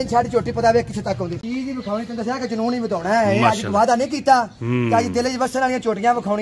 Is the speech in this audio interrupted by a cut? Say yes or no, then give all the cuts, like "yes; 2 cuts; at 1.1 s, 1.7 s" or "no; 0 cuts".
yes; 1 cut; at 1.4 s